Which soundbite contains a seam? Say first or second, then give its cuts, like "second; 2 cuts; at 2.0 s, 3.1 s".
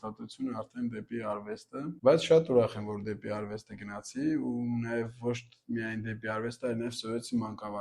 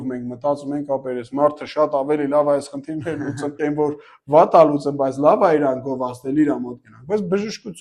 first; 1 cut; at 1.9 s